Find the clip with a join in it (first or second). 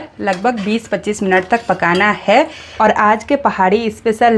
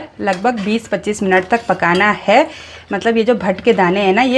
first